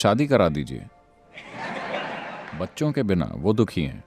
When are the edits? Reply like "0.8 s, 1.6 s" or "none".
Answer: 2.5 s